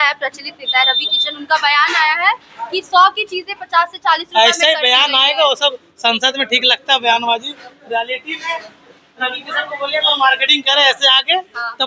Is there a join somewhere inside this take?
no; 0 cuts

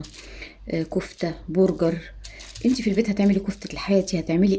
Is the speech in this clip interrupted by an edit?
no; 0 cuts

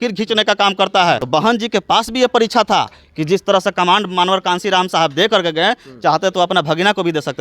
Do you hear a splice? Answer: yes; 1 cut; at 1.2 s

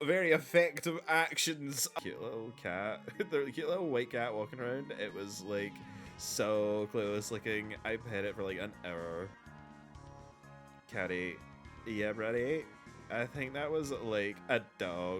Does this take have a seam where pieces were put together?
yes; 1 cut; at 1.9 s

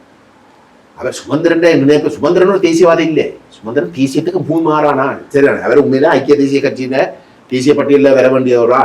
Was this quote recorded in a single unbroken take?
yes; 0 cuts

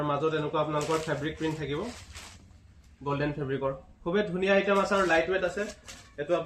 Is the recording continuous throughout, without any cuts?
yes; 0 cuts

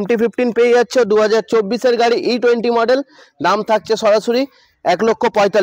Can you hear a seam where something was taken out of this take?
no; 0 cuts

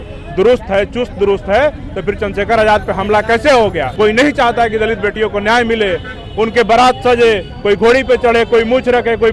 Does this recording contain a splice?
yes; 1 cut; at 3.9 s

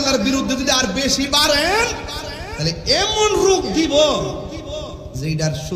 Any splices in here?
no; 0 cuts

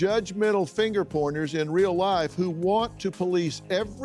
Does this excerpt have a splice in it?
no; 0 cuts

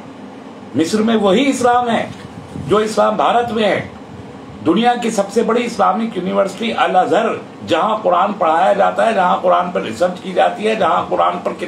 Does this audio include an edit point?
no; 0 cuts

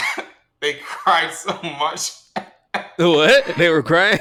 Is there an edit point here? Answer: no; 0 cuts

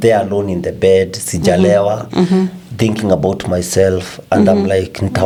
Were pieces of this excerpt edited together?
no; 0 cuts

